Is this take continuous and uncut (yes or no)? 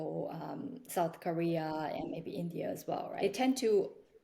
no